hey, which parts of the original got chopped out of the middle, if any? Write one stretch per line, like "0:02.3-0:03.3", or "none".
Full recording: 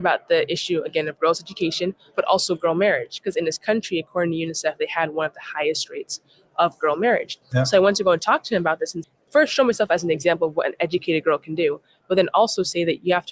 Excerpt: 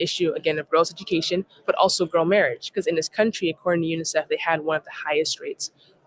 none